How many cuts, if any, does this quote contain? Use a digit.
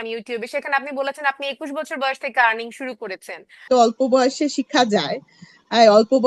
1